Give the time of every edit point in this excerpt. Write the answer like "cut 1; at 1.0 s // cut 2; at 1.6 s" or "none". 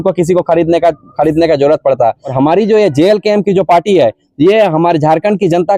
cut 1; at 2.3 s